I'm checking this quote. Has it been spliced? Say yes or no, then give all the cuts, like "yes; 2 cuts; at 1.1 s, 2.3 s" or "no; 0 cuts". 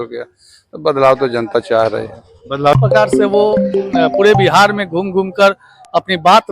yes; 1 cut; at 2.7 s